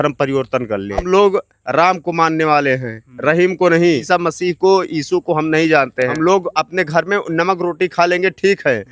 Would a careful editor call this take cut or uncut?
cut